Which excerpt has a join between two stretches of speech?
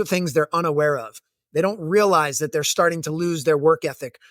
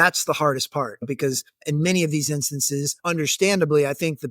second; 2 cuts; at 1.2 s, 2.9 s

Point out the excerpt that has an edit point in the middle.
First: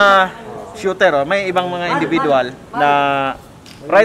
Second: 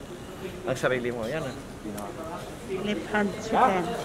first; 1 cut; at 2.6 s

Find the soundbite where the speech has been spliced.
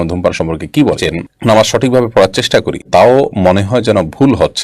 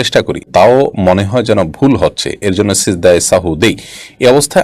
first; 1 cut; at 1.0 s

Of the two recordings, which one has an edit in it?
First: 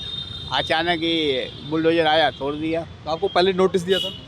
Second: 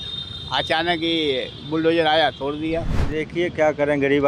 second; 1 cut; at 2.9 s

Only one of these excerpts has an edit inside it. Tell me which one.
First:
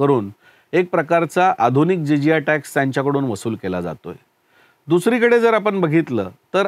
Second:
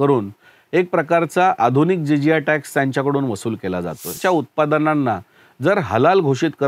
second; 1 cut; at 4.2 s

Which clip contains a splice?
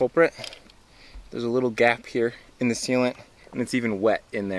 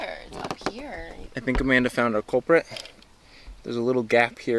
second; 1 cut; at 1.2 s

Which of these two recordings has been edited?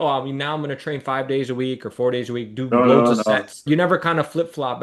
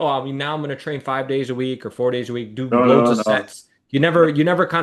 first; 1 cut; at 3.6 s

